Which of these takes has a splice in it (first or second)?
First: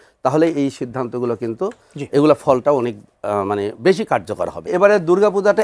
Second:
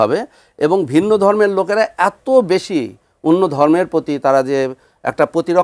first